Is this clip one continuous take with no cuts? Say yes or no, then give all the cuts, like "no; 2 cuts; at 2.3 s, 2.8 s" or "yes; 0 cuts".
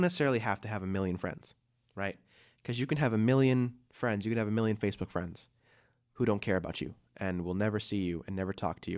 yes; 0 cuts